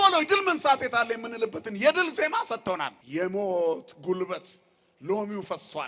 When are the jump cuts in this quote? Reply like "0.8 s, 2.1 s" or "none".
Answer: 3.0 s